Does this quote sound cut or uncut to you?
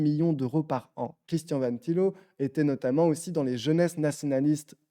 cut